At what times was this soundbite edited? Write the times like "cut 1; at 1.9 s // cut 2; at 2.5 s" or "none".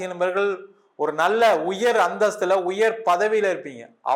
none